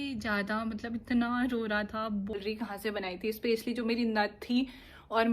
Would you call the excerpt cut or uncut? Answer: cut